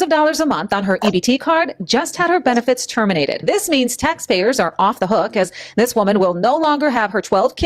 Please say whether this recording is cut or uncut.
cut